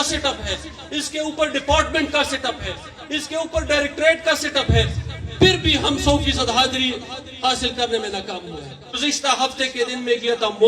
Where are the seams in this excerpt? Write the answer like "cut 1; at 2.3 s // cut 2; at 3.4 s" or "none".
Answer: cut 1; at 8.9 s